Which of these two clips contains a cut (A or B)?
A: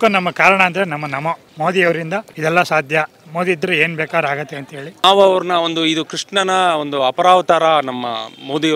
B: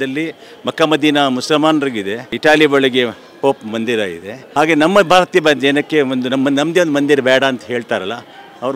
A